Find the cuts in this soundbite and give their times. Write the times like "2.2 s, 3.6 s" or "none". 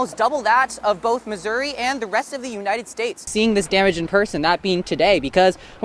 3.3 s